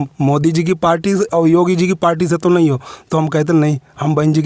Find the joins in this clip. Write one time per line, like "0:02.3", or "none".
none